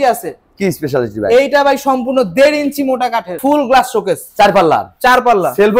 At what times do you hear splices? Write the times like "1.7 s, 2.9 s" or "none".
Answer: 3.4 s